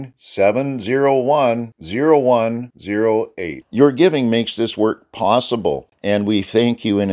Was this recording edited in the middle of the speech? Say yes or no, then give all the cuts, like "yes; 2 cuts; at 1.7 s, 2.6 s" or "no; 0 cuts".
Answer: yes; 1 cut; at 5.9 s